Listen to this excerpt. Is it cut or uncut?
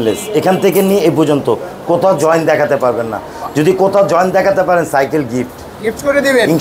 uncut